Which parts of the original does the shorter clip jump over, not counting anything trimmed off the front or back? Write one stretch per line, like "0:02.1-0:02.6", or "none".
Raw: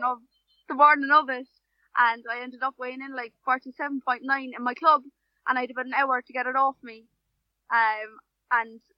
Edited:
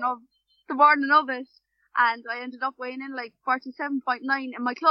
none